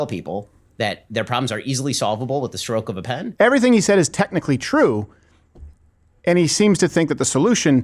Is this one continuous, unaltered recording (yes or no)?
no